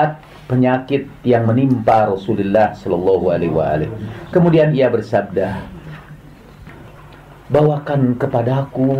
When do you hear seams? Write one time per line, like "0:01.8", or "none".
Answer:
0:06.7